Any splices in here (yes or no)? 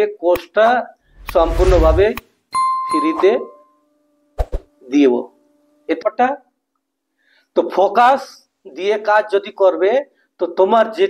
yes